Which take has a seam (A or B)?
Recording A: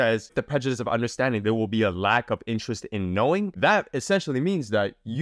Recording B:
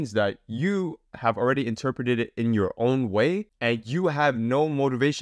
A